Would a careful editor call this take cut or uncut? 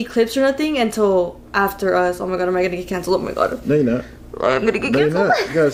uncut